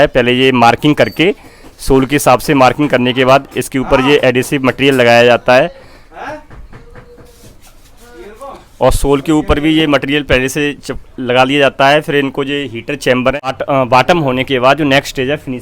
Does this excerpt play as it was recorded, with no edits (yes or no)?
no